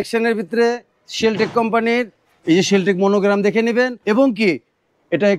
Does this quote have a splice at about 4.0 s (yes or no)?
yes